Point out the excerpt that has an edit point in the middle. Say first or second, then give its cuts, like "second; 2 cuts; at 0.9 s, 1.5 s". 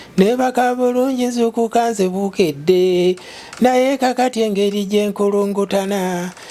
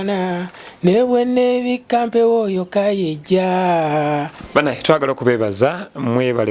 second; 1 cut; at 4.4 s